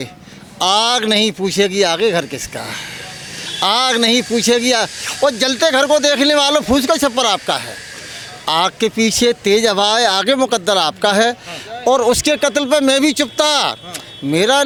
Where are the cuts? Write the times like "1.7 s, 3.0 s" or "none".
none

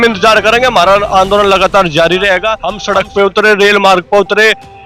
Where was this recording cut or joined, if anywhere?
2.7 s

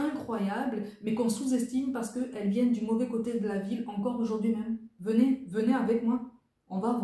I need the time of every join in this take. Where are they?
4.9 s

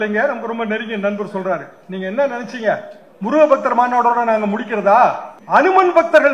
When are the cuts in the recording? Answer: 5.3 s

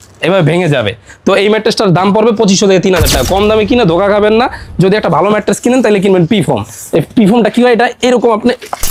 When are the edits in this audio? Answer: none

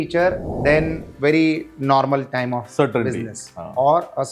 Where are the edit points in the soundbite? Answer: 1.0 s

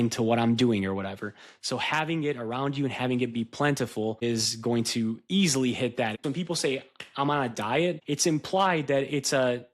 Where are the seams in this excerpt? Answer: 4.2 s, 6.2 s, 8.0 s

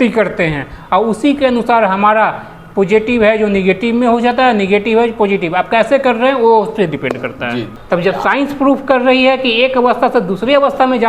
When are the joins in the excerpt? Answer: 7.7 s

